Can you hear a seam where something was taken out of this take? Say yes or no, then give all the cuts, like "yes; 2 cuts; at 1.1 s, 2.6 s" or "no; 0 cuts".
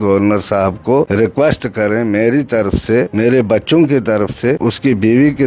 yes; 3 cuts; at 1.1 s, 3.1 s, 4.6 s